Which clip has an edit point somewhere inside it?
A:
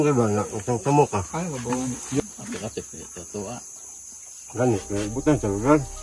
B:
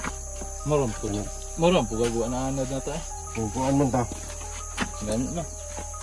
A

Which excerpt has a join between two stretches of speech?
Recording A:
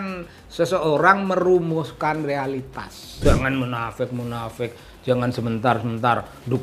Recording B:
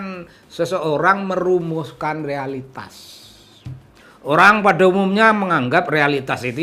A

